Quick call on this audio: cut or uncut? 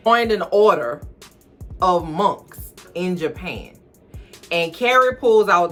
uncut